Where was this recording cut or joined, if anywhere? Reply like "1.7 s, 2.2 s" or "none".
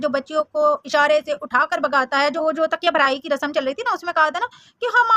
2.4 s